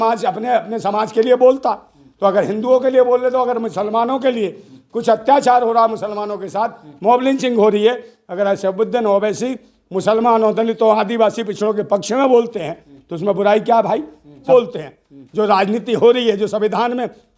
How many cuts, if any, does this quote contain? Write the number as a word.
one